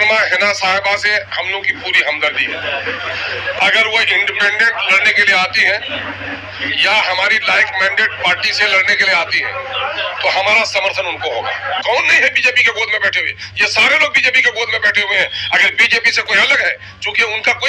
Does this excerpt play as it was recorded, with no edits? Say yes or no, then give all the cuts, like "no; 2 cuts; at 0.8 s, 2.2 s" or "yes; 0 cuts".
no; 1 cut; at 11.8 s